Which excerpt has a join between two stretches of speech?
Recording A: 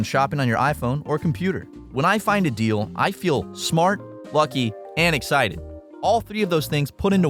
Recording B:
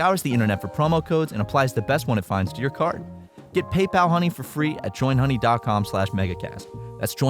B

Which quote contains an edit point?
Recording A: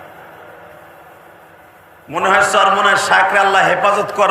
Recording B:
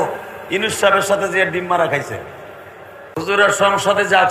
B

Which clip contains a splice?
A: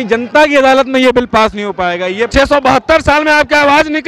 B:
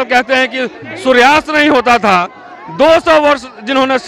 A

